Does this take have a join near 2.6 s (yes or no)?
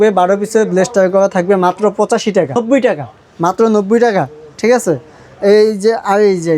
yes